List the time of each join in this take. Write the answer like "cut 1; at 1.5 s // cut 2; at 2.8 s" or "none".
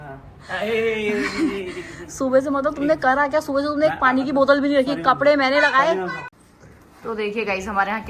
cut 1; at 6.2 s